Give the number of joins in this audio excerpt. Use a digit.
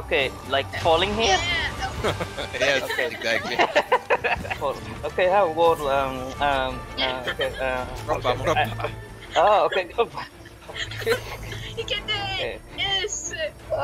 1